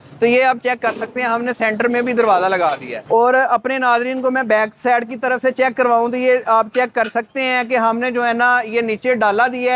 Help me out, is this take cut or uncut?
uncut